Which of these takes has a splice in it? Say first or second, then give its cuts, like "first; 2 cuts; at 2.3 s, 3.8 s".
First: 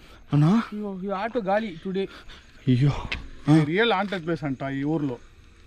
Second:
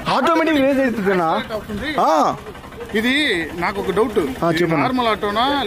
first; 1 cut; at 3.3 s